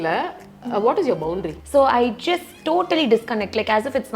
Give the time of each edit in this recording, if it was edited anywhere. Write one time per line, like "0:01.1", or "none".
0:01.6